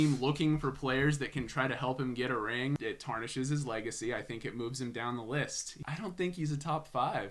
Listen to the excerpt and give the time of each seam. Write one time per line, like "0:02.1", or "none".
0:02.8
0:05.7